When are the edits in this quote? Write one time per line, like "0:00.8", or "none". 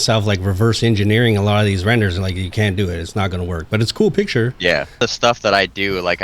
0:05.0